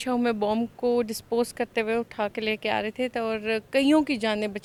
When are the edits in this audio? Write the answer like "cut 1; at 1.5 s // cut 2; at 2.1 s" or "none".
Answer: none